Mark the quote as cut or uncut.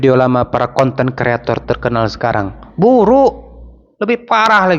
uncut